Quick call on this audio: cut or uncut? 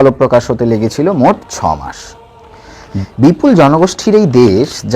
cut